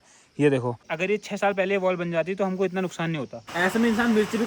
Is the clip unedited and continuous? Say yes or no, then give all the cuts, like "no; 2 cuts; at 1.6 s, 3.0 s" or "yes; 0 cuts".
no; 2 cuts; at 0.9 s, 3.4 s